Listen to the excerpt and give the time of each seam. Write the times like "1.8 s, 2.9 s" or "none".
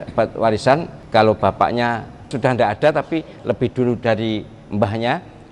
0.9 s, 2.3 s